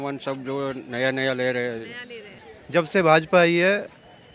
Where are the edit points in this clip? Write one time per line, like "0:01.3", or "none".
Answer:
0:02.5